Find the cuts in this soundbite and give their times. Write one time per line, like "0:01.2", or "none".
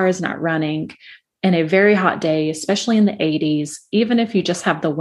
none